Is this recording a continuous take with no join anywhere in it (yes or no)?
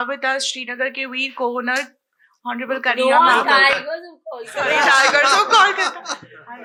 yes